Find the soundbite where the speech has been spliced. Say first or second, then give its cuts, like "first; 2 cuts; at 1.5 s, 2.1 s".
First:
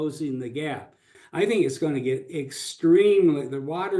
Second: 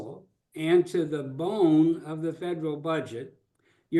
first; 1 cut; at 1.2 s